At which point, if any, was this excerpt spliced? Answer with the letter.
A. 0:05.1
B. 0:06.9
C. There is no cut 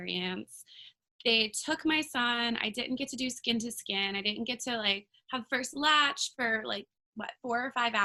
C